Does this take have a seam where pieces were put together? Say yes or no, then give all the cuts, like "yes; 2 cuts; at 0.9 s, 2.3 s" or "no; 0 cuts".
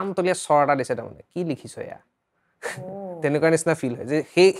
no; 0 cuts